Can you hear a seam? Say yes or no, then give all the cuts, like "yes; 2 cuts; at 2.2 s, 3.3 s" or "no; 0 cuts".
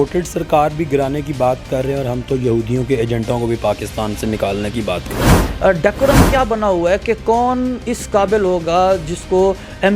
yes; 1 cut; at 5.3 s